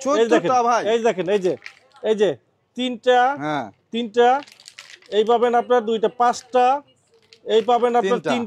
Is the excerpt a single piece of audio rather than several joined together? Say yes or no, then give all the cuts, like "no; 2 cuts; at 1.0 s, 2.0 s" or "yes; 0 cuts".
yes; 0 cuts